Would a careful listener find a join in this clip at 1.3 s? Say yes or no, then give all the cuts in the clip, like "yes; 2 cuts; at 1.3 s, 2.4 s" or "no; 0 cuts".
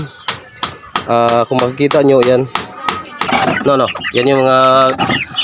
no; 1 cut; at 3.3 s